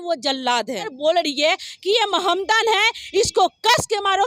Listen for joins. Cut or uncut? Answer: cut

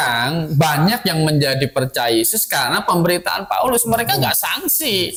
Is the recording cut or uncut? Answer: uncut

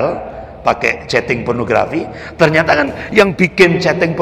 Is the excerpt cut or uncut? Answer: uncut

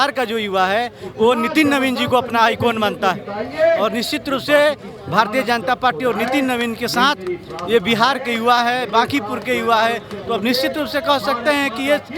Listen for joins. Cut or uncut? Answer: uncut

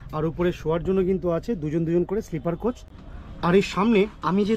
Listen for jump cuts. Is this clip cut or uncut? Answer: uncut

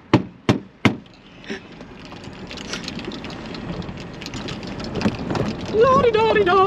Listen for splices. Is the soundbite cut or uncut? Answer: uncut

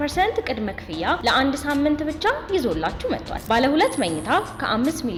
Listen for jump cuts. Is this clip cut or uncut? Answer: uncut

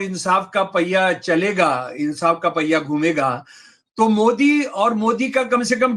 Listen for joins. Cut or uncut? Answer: uncut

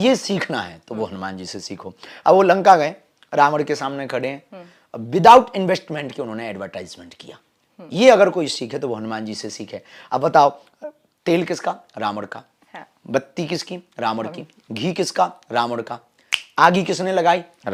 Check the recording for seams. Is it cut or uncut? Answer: uncut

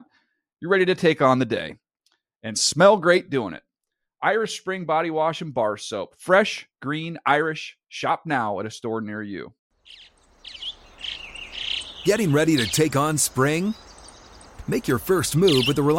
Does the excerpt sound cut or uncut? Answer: cut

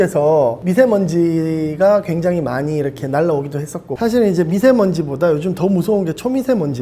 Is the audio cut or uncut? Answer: cut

